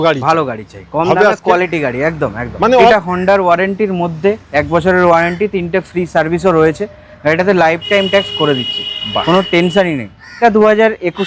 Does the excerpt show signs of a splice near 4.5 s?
no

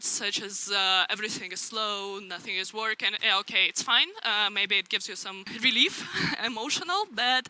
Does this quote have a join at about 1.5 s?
no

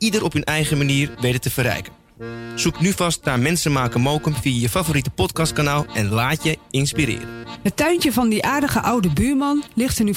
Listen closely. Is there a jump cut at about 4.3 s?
no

